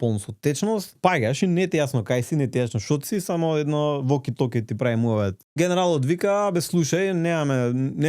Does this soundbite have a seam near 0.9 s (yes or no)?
yes